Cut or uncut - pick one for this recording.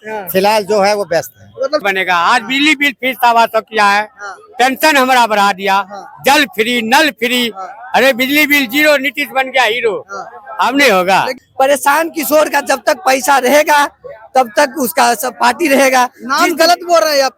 cut